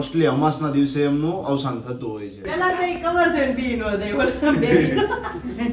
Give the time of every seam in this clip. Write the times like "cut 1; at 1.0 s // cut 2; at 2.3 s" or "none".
cut 1; at 2.5 s